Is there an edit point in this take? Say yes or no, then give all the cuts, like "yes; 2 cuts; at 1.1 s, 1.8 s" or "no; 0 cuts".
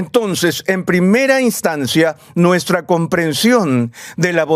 no; 0 cuts